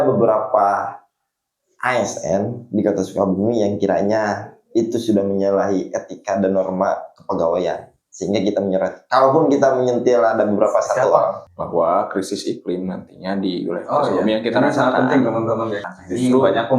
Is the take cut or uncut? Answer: cut